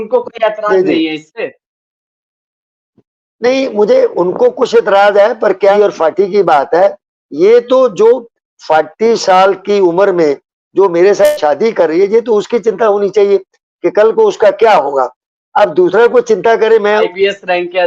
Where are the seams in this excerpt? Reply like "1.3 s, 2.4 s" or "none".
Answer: 5.7 s, 17.1 s